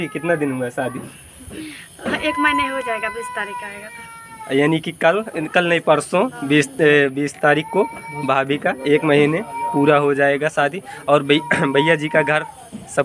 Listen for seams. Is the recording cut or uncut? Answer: uncut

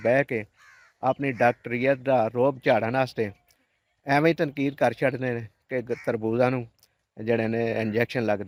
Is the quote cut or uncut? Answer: uncut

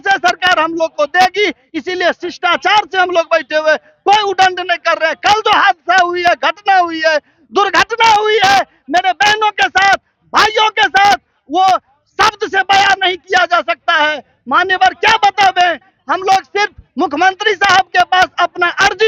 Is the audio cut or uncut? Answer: uncut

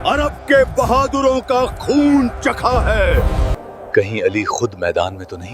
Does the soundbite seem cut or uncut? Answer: cut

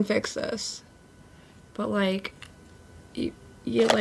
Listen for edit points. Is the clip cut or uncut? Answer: uncut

